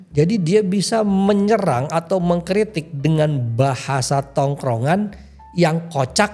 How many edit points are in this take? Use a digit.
0